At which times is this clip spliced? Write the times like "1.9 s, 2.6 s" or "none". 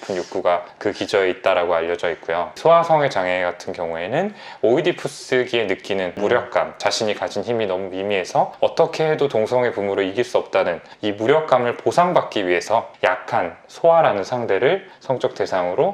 2.6 s, 6.8 s, 12.9 s